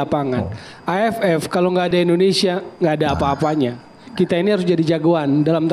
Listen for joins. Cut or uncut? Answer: uncut